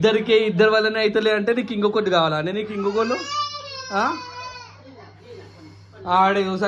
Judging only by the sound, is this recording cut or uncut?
uncut